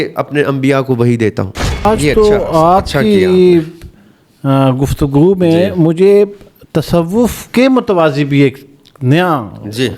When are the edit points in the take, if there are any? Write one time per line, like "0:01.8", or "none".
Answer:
0:01.8